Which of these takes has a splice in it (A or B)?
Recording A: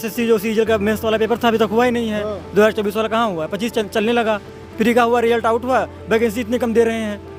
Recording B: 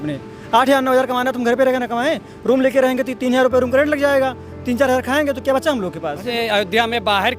B